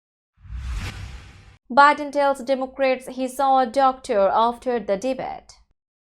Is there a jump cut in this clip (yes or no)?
yes